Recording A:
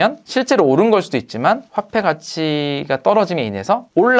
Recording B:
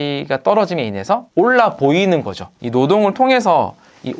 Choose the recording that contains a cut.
B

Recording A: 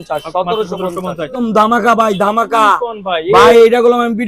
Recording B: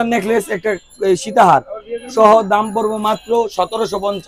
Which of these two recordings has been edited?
A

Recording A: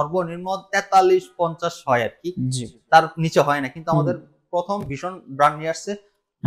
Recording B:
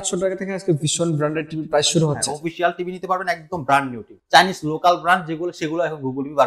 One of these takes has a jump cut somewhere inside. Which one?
B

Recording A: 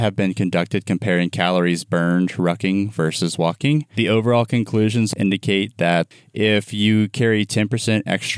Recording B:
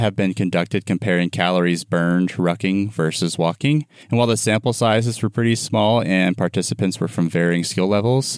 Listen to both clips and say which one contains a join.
A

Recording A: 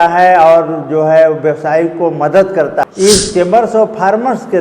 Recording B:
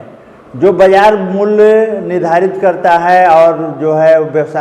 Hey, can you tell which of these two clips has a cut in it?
A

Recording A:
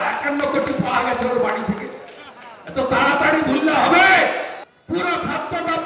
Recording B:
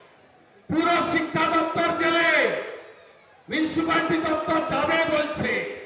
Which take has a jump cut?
A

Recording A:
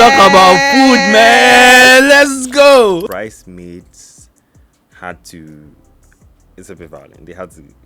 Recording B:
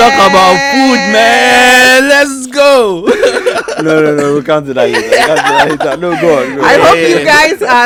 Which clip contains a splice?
A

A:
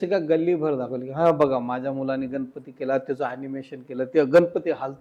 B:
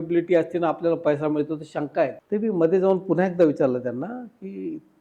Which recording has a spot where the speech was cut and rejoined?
B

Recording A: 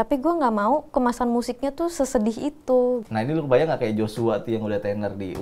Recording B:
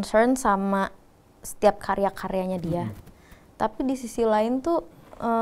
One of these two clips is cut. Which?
A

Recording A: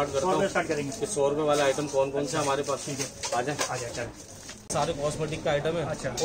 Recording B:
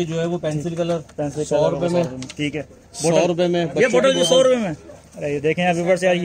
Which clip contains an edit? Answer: A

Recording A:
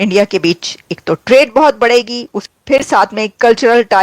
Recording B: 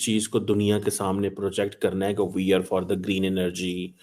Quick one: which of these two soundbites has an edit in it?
A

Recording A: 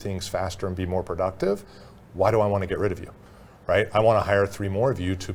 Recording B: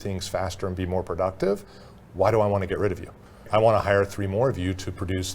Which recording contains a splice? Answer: B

